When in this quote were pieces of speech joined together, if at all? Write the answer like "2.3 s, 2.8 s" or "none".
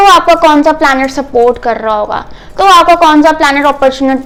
none